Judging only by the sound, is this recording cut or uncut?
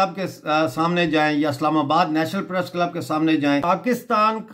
cut